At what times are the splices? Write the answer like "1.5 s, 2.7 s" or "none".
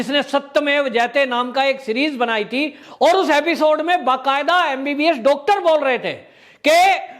2.8 s